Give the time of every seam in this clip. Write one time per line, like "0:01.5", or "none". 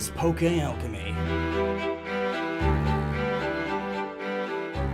0:04.0